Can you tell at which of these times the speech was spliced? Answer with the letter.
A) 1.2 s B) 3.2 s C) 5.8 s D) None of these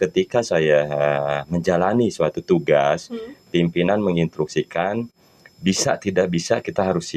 D